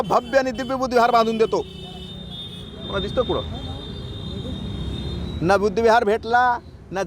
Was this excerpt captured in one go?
yes; 0 cuts

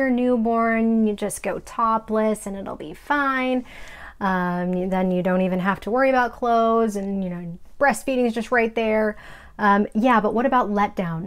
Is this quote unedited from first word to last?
yes; 0 cuts

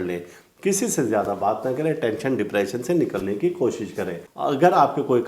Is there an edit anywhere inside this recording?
yes; 1 cut; at 4.2 s

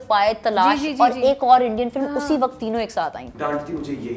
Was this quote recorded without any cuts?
no; 1 cut; at 3.2 s

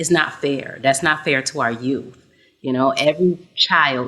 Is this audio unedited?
yes; 0 cuts

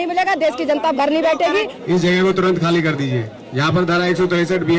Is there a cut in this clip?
yes; 1 cut; at 1.8 s

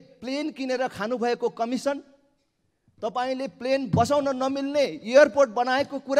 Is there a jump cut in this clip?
no; 0 cuts

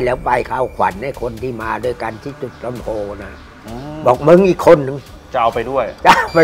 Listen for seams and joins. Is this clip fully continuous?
yes; 0 cuts

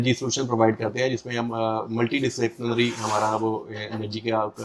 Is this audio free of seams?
yes; 0 cuts

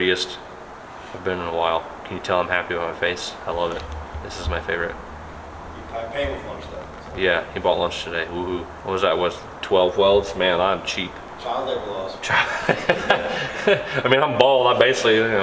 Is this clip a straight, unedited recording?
no; 3 cuts; at 2.0 s, 8.7 s, 11.3 s

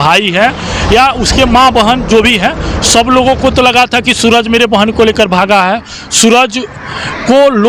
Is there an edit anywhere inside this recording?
no; 0 cuts

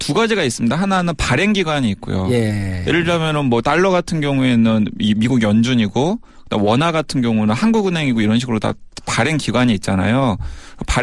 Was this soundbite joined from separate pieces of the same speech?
yes; 1 cut; at 9.2 s

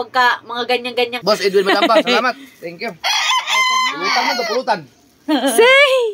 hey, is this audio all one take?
no; 1 cut; at 1.2 s

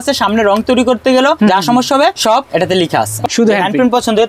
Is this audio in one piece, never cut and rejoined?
no; 2 cuts; at 1.4 s, 3.2 s

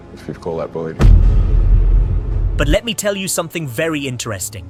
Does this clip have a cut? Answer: no; 0 cuts

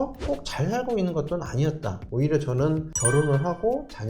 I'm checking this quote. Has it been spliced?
yes; 1 cut; at 2.0 s

